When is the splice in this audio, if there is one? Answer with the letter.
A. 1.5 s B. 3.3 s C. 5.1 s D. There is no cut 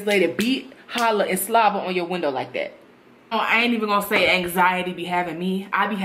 B